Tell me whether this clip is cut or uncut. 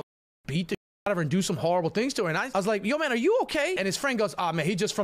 cut